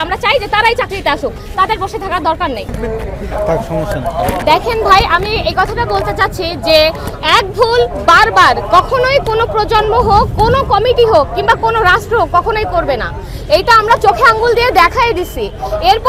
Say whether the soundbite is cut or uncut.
cut